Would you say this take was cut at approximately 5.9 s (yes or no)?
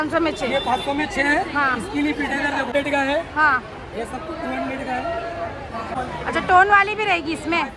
yes